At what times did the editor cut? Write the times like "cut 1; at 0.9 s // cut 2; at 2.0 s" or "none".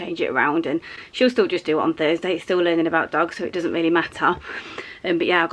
none